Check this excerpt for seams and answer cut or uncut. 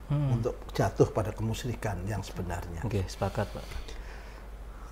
uncut